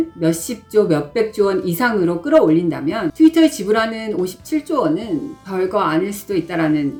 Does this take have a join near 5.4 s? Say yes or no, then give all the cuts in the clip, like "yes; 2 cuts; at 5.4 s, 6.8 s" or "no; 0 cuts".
no; 0 cuts